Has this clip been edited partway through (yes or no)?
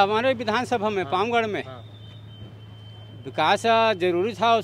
no